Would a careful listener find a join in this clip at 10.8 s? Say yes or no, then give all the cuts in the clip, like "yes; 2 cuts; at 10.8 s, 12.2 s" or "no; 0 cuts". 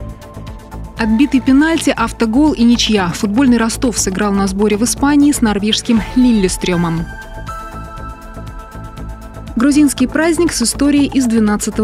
no; 1 cut; at 1.0 s